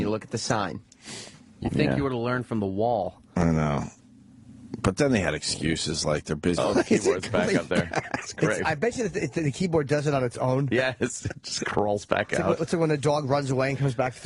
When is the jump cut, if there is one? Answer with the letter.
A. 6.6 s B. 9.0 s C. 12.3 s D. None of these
D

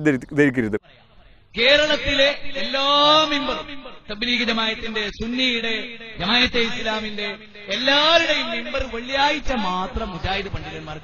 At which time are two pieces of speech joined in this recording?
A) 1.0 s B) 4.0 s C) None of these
A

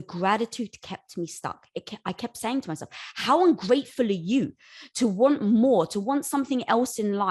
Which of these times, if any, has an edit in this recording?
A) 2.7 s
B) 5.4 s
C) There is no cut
C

